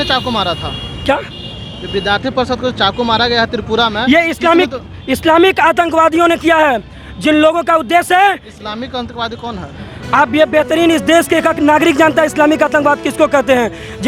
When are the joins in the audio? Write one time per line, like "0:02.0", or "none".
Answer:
none